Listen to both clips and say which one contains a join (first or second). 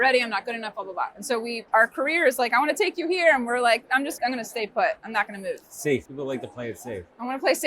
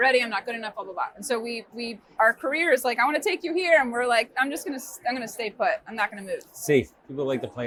first